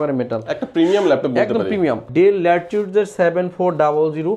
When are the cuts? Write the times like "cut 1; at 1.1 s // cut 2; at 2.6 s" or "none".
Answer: cut 1; at 2.0 s